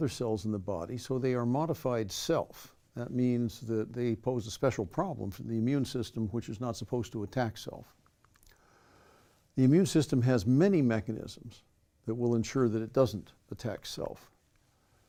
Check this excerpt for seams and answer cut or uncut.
uncut